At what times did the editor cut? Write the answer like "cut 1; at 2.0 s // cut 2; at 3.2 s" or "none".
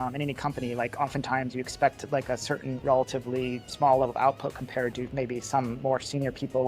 none